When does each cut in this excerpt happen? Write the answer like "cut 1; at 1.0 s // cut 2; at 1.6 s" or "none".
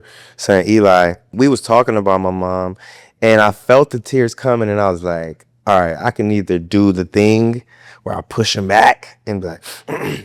cut 1; at 1.3 s